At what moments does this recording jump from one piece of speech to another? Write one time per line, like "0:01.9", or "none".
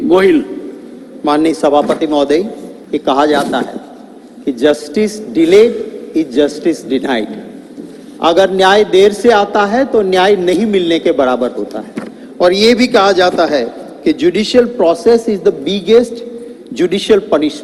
none